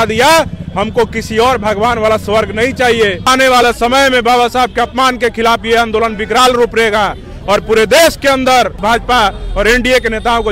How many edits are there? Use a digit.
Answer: 2